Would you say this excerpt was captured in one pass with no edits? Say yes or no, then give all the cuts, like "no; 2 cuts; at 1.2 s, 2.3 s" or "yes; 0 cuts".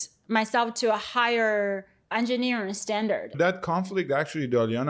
no; 1 cut; at 3.3 s